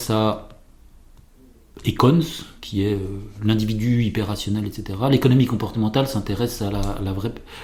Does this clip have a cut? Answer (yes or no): no